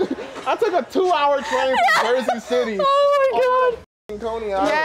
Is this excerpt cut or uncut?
uncut